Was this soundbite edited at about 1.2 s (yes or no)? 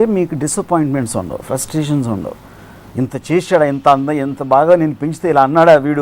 no